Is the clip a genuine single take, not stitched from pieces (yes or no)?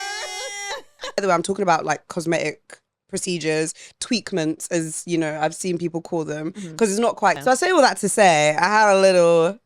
no